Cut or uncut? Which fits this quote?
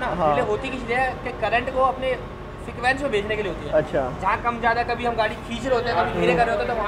uncut